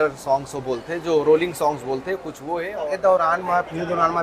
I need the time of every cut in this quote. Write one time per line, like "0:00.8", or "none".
0:02.7